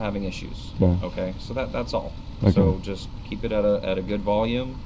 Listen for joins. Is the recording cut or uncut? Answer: uncut